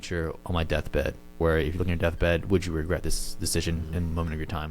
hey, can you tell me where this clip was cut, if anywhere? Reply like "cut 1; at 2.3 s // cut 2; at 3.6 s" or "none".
cut 1; at 1.4 s